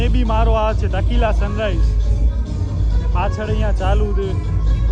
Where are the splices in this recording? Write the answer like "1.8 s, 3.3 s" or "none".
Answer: none